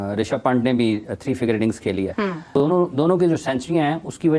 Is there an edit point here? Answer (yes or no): yes